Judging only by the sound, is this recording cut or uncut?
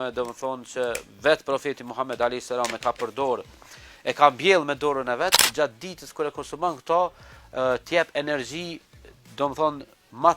cut